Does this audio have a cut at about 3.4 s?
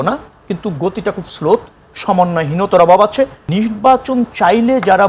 yes; 1 cut; at 3.4 s

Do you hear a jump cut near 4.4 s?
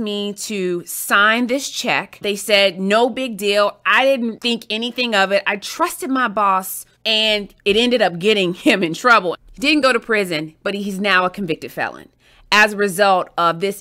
yes; 4 cuts; at 2.2 s, 4.4 s, 7.4 s, 9.4 s

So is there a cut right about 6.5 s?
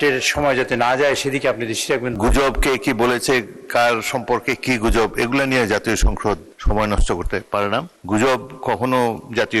yes; 3 cuts; at 2.2 s, 6.5 s, 7.9 s

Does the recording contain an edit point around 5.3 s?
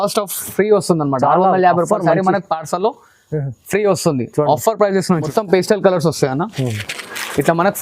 yes; 1 cut; at 5.3 s

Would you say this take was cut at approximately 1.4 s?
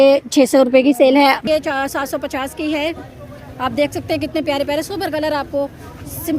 yes; 1 cut; at 1.4 s

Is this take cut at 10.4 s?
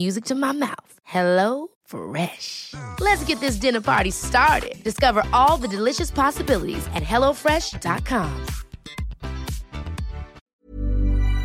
yes; 1 cut; at 10.4 s

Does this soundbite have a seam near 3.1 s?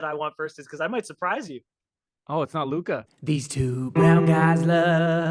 yes; 1 cut; at 3.1 s

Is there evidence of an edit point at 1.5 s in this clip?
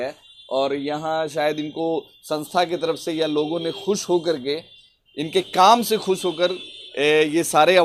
no; 0 cuts

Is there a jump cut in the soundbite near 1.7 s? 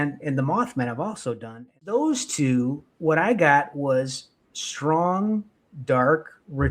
yes; 1 cut; at 1.7 s

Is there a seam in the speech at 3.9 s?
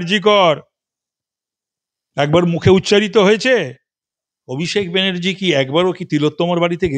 yes; 1 cut; at 3.9 s

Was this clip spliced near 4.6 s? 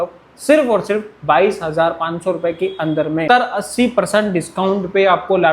no; 1 cut; at 3.2 s

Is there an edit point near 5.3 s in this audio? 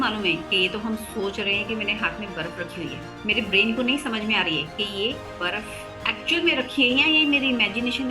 yes; 2 cuts; at 3.1 s, 5.3 s

